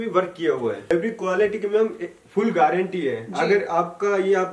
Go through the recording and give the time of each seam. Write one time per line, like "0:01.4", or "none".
0:00.9